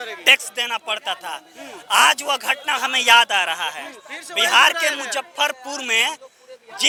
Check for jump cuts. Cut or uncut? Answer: uncut